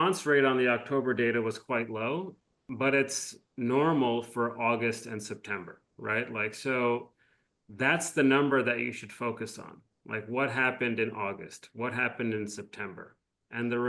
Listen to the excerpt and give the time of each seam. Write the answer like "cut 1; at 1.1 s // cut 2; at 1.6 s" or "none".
cut 1; at 2.7 s